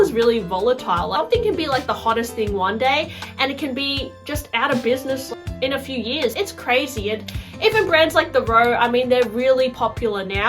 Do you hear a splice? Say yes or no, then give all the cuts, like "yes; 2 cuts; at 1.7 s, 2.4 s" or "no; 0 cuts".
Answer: yes; 3 cuts; at 1.1 s, 5.3 s, 6.3 s